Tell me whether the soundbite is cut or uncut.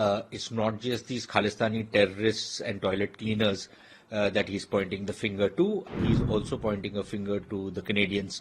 cut